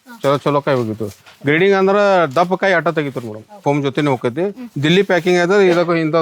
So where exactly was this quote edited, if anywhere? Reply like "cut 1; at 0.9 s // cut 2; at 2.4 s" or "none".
cut 1; at 3.6 s

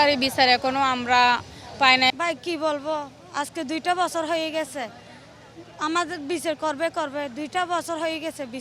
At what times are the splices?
cut 1; at 2.1 s

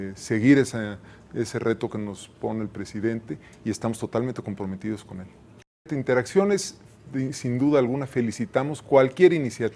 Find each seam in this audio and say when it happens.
cut 1; at 5.8 s

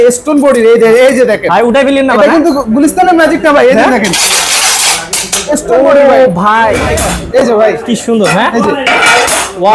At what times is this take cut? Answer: cut 1; at 6.9 s

